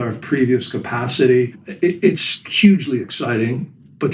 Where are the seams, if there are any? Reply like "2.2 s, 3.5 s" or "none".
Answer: 1.6 s